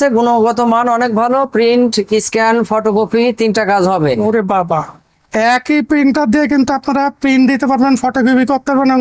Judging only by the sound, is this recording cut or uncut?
uncut